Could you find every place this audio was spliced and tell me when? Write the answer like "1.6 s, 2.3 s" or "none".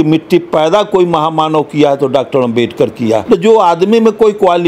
3.2 s